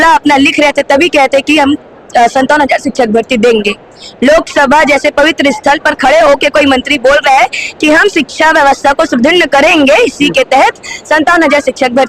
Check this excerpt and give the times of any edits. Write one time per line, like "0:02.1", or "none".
none